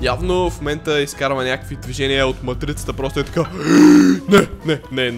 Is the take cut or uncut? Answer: uncut